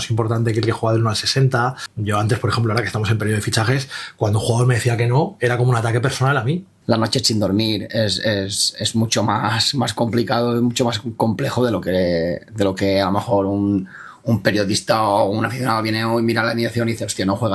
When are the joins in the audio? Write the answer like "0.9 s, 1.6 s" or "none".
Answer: 1.9 s, 6.7 s